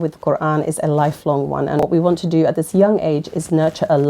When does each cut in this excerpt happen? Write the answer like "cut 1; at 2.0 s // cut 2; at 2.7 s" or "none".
cut 1; at 1.8 s